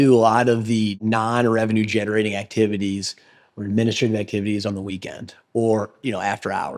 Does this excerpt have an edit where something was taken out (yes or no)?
yes